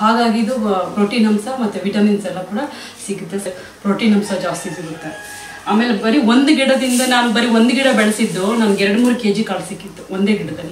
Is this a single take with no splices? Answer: no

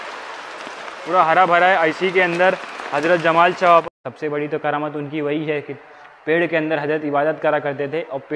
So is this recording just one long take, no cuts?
no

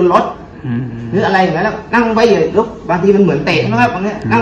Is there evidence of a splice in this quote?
no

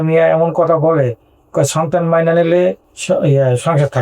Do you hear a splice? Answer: yes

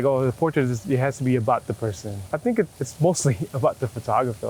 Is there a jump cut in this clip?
yes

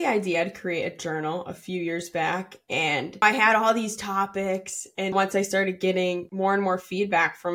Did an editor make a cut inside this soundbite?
yes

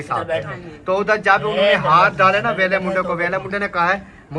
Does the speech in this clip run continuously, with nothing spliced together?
yes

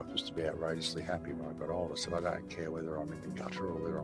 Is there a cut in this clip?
no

